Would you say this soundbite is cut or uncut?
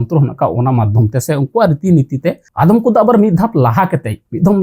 cut